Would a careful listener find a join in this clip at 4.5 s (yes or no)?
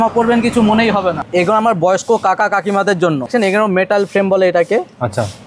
no